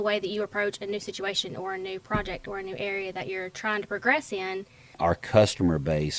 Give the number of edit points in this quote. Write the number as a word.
one